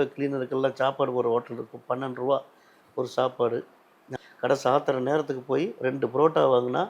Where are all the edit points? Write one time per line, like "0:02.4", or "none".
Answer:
0:04.1